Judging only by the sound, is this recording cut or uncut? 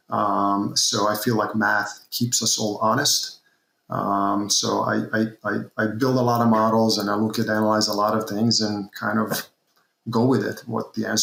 uncut